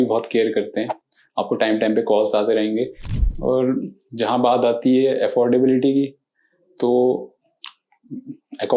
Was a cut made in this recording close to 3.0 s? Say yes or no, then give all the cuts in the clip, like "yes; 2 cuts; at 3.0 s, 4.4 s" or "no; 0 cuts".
yes; 1 cut; at 3.0 s